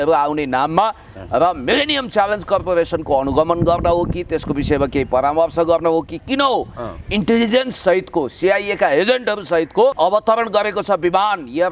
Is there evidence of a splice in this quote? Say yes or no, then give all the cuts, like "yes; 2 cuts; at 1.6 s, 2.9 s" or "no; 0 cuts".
yes; 1 cut; at 9.9 s